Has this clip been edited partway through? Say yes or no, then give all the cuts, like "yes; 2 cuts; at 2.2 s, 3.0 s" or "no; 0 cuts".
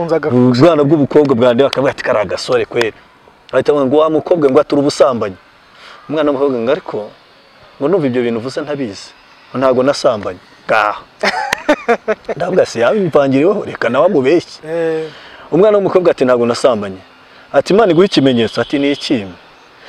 no; 0 cuts